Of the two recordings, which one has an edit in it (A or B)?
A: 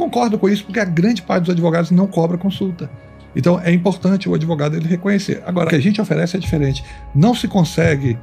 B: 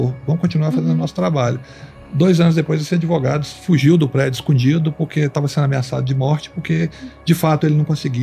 A